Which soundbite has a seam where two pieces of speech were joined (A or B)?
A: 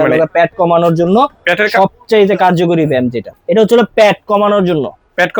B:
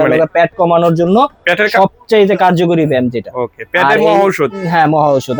A